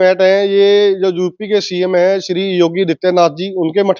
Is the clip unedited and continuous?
yes; 0 cuts

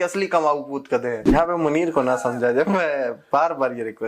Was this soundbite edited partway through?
yes; 1 cut; at 1.2 s

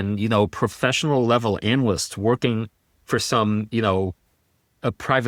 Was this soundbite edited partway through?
no; 0 cuts

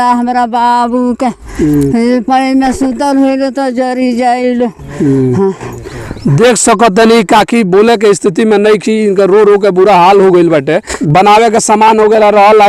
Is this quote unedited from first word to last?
yes; 0 cuts

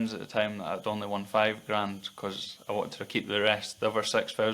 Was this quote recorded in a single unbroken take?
yes; 0 cuts

